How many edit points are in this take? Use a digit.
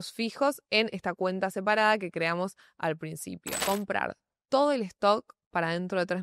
1